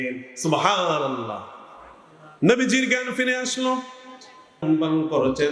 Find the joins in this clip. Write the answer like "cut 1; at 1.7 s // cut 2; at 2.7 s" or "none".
cut 1; at 4.6 s